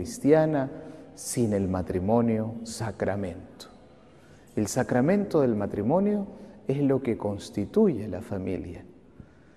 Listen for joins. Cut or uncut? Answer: uncut